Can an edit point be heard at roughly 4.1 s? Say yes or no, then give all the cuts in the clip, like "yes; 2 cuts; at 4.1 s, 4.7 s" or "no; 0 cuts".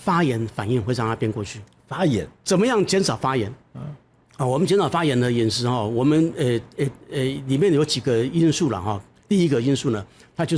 no; 1 cut; at 2.3 s